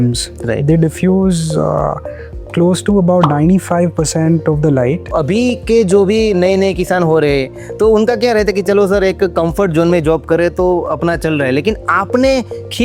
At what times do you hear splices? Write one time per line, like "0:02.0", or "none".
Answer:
0:05.1